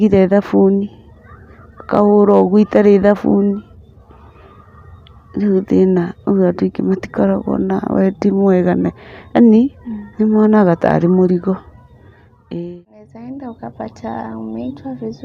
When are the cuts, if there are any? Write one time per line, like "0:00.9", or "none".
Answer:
0:13.1